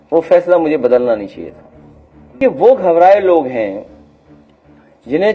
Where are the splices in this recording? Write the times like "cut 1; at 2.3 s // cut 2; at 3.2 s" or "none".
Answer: cut 1; at 2.4 s